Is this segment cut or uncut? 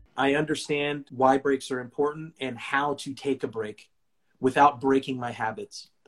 cut